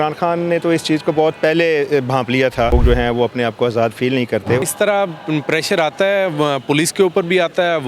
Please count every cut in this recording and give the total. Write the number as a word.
two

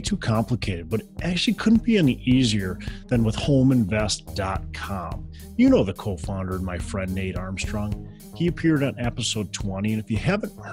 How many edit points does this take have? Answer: zero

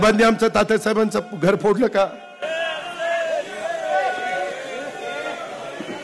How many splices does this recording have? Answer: zero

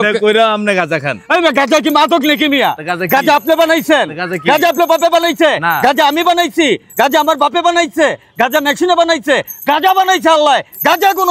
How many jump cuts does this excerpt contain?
zero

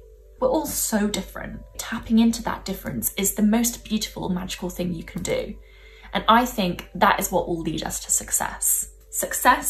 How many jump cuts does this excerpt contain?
zero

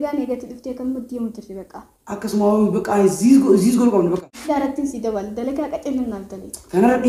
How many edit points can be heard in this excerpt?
one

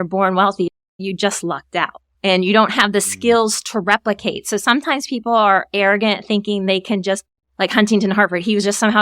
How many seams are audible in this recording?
one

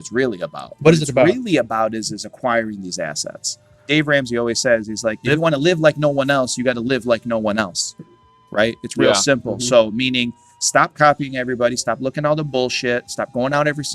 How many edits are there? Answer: two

